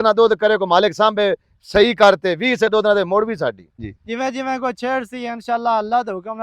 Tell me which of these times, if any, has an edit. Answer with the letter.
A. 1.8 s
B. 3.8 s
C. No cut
B